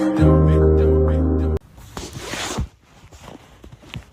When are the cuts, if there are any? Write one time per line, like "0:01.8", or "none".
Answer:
0:01.6